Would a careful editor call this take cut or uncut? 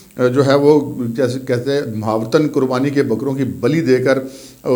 uncut